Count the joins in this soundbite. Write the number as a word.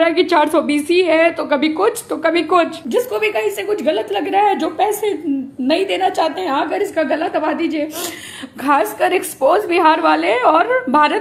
one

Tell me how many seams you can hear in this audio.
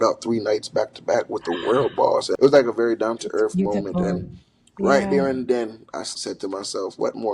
two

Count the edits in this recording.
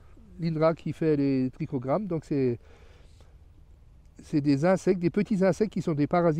zero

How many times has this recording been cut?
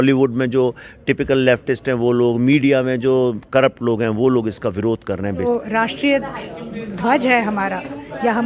one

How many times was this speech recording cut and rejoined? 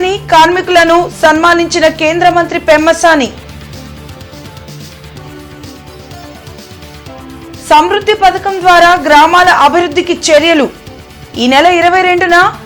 zero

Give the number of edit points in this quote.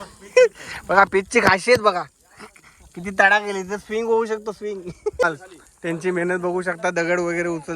one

